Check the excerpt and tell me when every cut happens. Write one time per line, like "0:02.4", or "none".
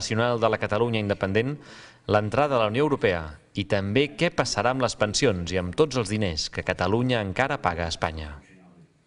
0:02.5